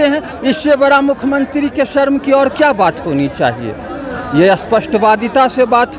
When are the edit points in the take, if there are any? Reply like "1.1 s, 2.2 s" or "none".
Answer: none